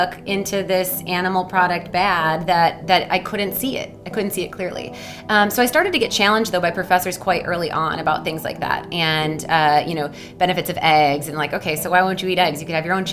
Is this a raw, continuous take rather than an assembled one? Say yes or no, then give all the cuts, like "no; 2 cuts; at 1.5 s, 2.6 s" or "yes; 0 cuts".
yes; 0 cuts